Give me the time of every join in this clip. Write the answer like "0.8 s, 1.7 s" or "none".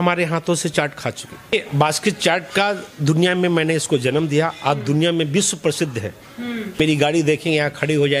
1.5 s, 6.8 s